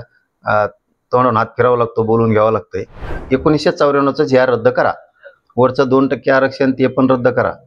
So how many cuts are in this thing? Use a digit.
1